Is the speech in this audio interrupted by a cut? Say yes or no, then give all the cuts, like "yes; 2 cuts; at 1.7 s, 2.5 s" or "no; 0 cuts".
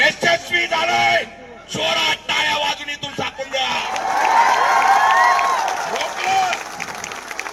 no; 0 cuts